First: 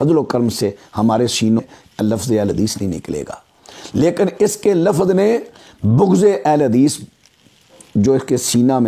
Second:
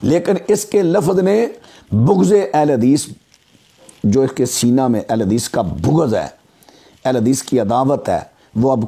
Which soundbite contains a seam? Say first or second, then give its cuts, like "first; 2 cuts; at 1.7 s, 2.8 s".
first; 1 cut; at 1.6 s